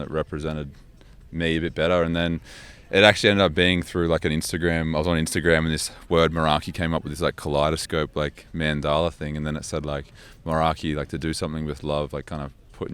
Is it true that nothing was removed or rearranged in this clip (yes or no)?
yes